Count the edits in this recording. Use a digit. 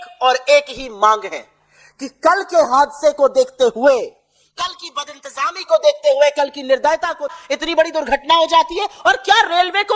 1